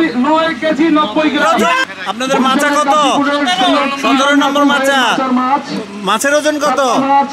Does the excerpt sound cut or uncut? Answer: cut